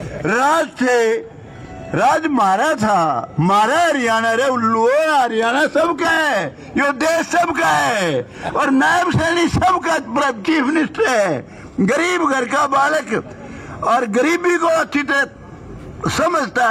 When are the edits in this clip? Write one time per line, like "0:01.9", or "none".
none